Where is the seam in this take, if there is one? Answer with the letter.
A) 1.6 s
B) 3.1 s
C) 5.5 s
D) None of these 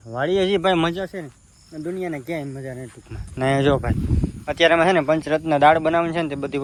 D